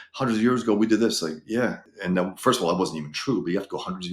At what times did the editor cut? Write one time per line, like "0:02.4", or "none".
0:01.9

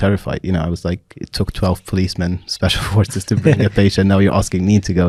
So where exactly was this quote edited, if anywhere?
none

